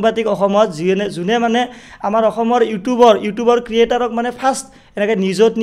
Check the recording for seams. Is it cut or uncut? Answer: uncut